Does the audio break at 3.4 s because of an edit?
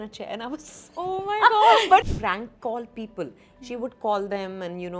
no; 1 cut; at 2.0 s

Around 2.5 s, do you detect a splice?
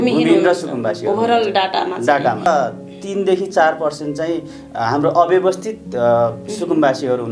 yes; 1 cut; at 2.5 s

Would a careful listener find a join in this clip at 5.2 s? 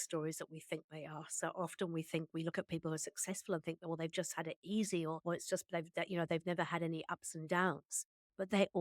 yes; 1 cut; at 5.2 s

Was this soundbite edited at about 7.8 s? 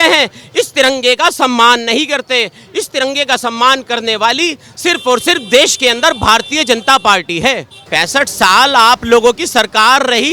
yes; 1 cut; at 7.8 s

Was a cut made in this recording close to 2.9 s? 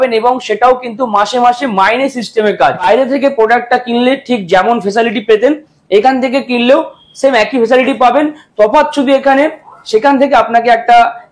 yes; 1 cut; at 2.9 s

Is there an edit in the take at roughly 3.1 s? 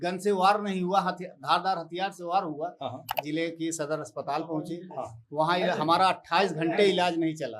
yes; 1 cut; at 3.1 s

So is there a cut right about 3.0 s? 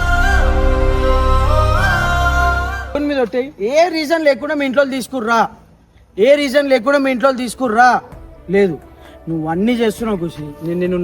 yes; 1 cut; at 3.0 s

